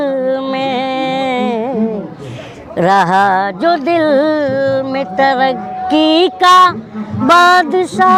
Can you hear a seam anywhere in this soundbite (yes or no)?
no